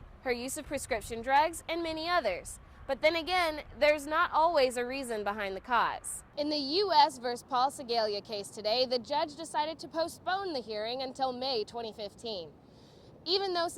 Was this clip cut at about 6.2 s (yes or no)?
yes